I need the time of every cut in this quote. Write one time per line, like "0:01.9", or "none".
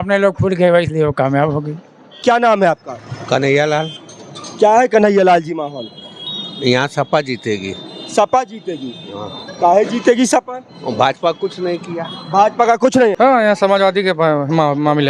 0:02.2
0:13.1